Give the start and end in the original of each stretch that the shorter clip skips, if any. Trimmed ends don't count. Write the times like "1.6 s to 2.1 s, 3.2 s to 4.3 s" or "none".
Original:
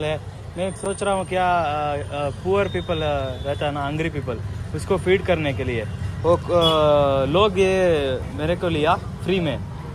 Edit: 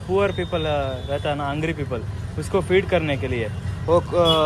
none